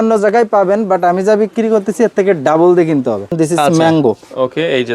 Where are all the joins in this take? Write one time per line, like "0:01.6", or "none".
0:03.3